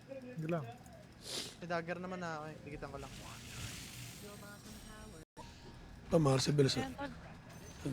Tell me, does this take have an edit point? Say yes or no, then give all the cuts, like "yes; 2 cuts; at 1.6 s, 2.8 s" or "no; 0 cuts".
yes; 1 cut; at 5.2 s